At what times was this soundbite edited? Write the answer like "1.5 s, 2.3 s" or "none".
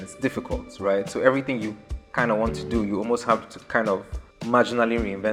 none